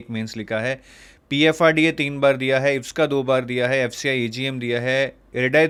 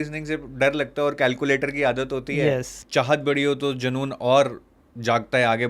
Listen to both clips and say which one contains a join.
second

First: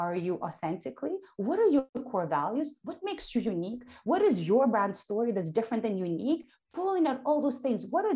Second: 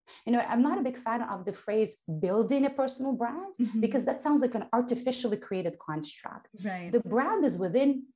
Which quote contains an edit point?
first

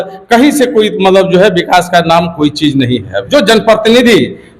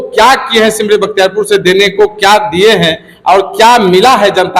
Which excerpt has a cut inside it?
first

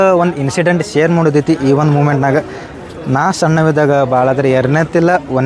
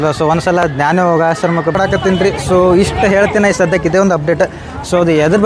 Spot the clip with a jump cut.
second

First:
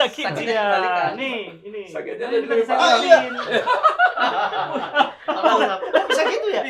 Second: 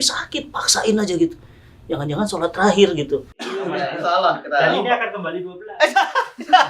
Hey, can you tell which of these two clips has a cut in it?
second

